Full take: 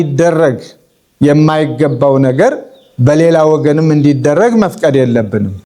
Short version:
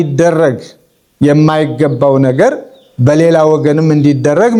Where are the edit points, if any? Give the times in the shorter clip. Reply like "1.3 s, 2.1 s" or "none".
none